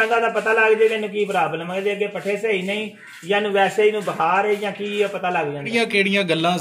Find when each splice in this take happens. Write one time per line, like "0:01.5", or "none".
0:05.7

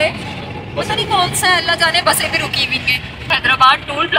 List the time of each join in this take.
0:03.3

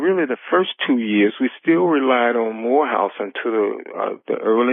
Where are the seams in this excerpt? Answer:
none

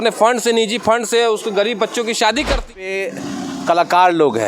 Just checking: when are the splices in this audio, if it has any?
0:02.8

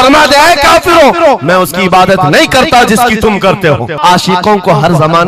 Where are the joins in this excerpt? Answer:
0:04.0

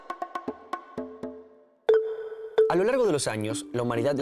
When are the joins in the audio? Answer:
0:01.1

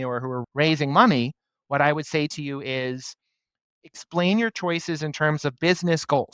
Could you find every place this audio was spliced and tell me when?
0:03.8

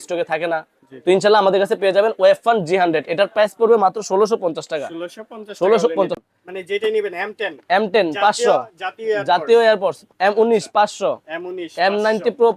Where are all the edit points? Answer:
0:06.2

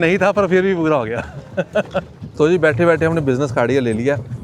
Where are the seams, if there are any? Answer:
0:02.2

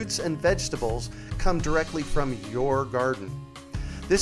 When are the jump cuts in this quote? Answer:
none

